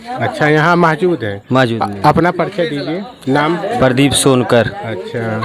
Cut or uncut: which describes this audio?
uncut